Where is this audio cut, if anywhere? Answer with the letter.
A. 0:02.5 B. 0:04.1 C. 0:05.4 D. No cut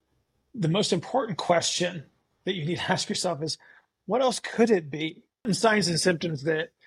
C